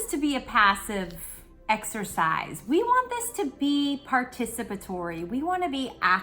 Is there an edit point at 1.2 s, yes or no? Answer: no